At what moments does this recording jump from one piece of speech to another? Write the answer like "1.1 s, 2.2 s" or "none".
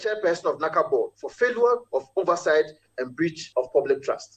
1.2 s, 3.4 s